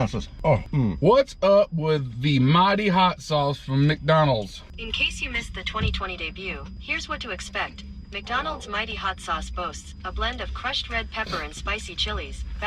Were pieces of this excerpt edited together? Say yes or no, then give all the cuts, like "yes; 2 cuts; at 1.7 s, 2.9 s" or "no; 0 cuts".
yes; 1 cut; at 4.7 s